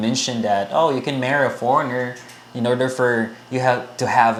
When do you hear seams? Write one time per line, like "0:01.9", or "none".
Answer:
none